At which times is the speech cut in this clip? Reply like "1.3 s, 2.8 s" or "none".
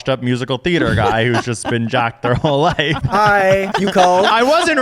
3.0 s, 3.7 s